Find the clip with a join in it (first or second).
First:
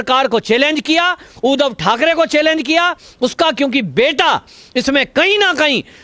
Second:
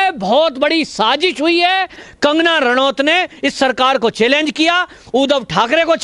second